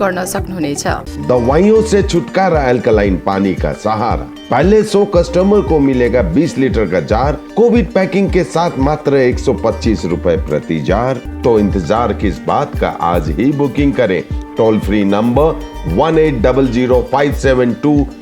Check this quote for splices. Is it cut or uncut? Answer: cut